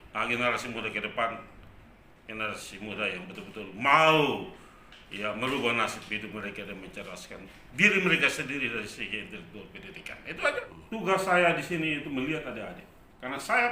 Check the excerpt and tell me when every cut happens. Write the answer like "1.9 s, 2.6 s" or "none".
10.8 s